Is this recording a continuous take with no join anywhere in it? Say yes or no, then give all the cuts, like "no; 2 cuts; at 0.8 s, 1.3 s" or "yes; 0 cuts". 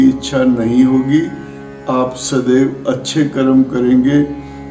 yes; 0 cuts